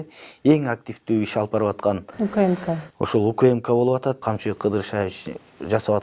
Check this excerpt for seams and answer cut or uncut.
cut